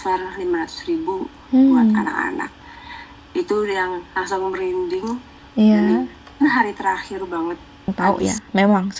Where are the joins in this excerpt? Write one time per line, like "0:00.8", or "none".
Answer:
0:07.9